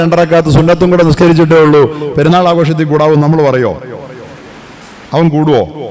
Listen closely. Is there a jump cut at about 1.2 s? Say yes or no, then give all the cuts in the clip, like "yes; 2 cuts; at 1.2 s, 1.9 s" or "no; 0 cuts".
yes; 1 cut; at 1.2 s